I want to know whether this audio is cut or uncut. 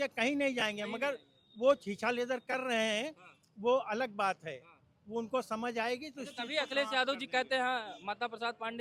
uncut